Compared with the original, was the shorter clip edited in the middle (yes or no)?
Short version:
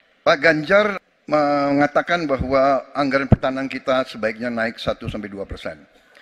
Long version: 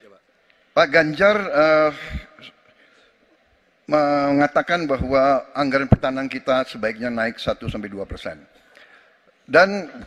yes